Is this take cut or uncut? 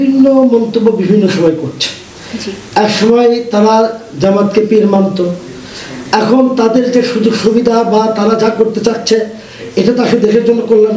uncut